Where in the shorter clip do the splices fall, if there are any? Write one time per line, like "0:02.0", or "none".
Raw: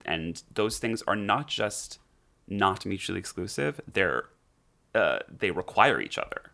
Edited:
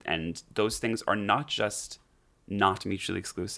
none